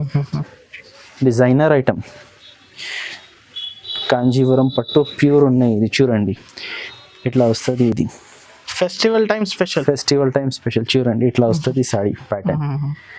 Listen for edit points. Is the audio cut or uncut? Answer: uncut